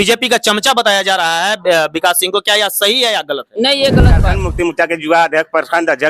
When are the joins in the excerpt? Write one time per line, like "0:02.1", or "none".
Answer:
0:04.4